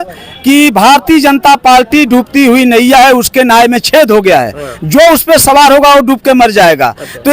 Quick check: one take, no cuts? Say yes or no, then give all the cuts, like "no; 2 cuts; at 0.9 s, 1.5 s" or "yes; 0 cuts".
yes; 0 cuts